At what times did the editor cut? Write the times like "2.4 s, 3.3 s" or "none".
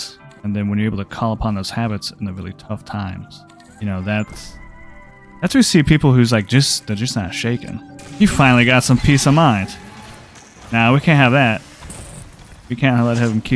8.0 s